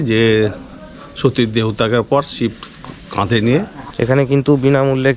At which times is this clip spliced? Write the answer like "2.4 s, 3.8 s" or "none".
3.8 s